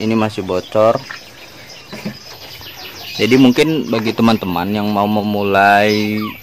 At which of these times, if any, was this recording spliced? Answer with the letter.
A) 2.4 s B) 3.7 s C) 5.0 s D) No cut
A